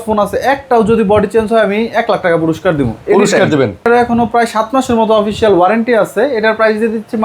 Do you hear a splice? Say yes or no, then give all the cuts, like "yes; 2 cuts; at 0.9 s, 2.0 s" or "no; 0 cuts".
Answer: yes; 1 cut; at 3.9 s